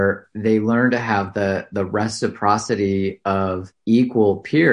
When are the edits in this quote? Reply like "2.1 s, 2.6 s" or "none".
3.7 s